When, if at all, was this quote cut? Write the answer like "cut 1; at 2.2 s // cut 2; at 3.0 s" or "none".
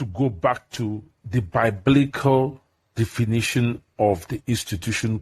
none